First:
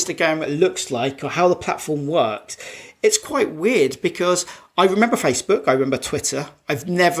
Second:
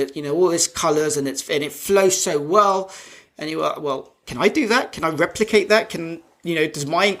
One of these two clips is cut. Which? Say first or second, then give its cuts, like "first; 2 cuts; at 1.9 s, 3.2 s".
second; 1 cut; at 4.2 s